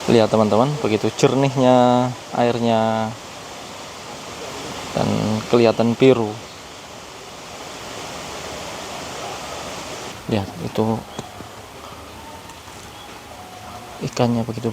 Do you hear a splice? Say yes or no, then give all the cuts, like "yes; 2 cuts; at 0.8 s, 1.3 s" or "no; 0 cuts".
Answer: yes; 1 cut; at 10.1 s